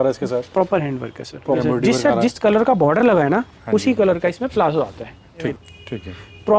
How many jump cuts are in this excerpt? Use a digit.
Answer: 2